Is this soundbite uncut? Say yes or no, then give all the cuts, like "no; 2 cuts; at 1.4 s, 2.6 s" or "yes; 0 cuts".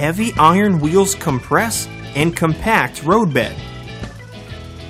yes; 0 cuts